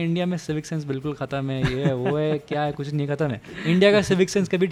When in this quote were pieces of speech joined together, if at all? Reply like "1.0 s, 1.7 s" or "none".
none

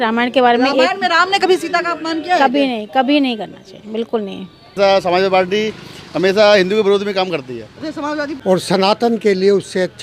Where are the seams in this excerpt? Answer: 4.8 s, 8.3 s

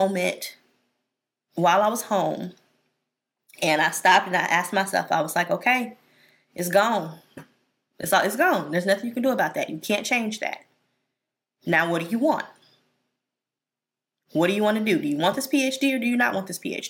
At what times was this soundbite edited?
none

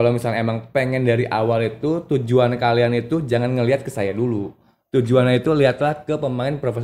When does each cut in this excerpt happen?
none

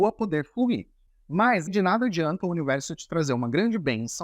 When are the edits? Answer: 1.7 s

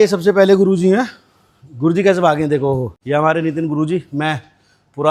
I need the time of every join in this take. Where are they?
none

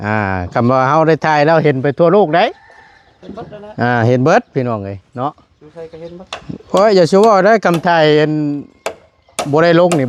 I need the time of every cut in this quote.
none

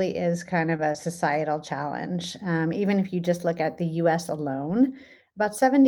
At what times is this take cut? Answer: none

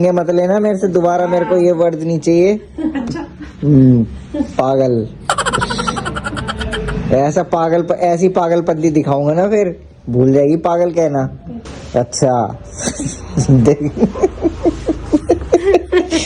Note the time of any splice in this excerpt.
none

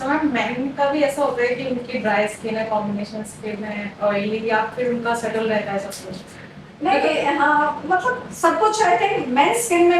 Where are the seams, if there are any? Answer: none

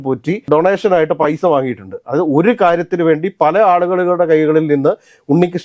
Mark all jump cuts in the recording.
none

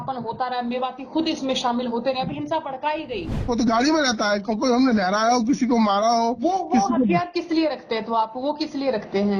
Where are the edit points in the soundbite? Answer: 3.3 s

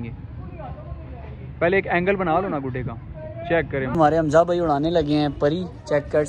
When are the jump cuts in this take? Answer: 3.9 s

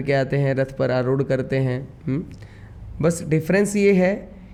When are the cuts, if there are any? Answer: none

